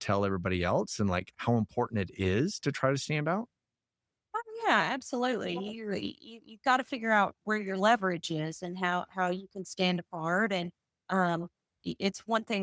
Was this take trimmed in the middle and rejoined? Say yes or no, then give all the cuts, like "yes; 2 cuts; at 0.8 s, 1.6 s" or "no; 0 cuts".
no; 0 cuts